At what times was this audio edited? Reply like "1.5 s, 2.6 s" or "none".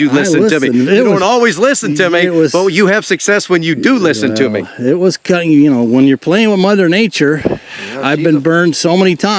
none